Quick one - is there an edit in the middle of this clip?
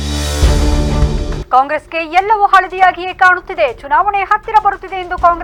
no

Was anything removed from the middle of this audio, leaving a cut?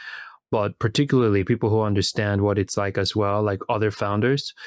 no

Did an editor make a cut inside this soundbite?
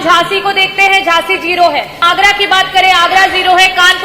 yes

